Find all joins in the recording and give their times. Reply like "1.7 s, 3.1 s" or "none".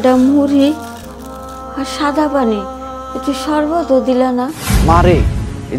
4.7 s

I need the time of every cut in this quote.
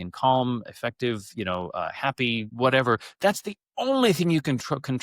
2.5 s

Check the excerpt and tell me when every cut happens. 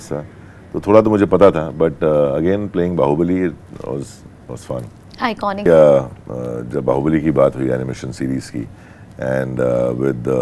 5.7 s

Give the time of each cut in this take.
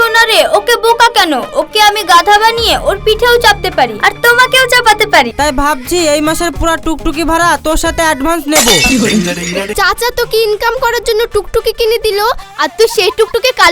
5.3 s, 9.7 s

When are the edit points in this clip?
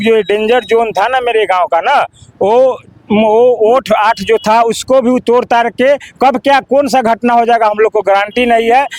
none

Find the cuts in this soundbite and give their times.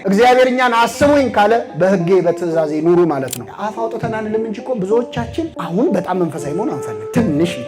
3.3 s

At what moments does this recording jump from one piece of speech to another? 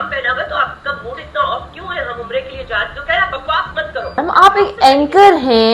4.2 s

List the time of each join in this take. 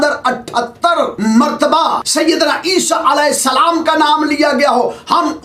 1.1 s, 2.0 s

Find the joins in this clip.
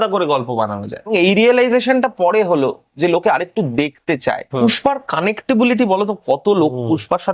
1.1 s, 4.6 s

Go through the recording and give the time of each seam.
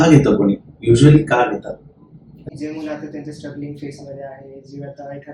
2.5 s

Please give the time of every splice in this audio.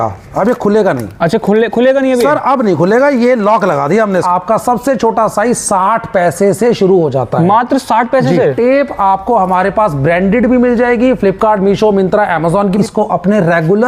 4.2 s, 8.5 s, 12.8 s

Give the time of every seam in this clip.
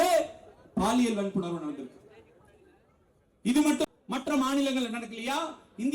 3.8 s

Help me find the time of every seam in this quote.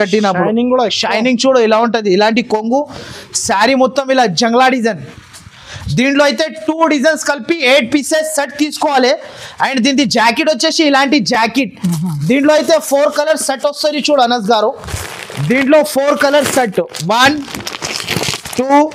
none

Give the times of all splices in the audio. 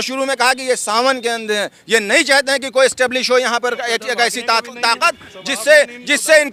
none

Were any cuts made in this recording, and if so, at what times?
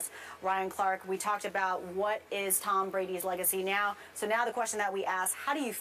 3.2 s

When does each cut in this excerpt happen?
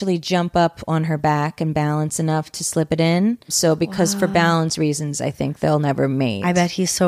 3.5 s

